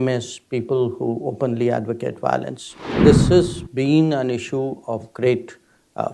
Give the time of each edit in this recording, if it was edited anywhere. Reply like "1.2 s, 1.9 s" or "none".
3.0 s